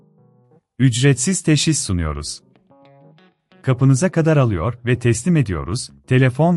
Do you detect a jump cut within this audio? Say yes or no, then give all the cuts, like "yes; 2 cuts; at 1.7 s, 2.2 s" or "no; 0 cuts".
no; 0 cuts